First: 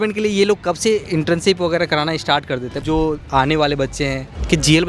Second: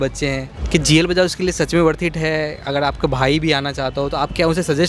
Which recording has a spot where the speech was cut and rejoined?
first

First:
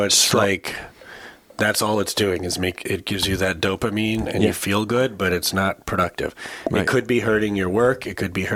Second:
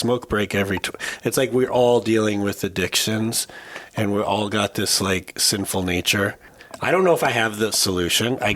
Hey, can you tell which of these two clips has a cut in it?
second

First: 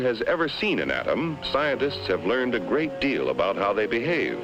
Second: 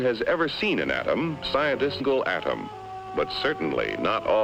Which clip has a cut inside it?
first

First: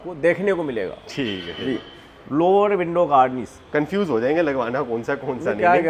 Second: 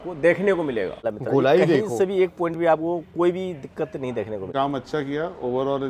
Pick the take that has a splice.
second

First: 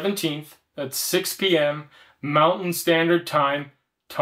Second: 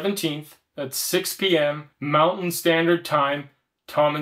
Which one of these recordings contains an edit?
second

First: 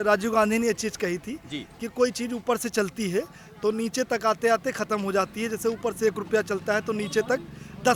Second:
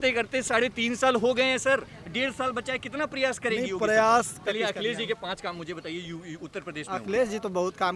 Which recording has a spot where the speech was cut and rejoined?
second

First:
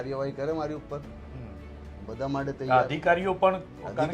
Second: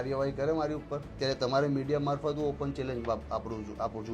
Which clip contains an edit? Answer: second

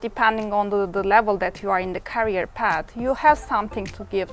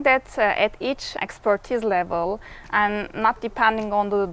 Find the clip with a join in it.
second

